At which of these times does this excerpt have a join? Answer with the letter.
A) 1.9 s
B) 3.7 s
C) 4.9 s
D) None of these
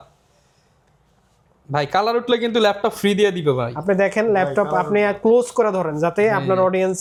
D